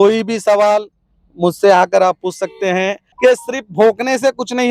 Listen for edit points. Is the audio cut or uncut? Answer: cut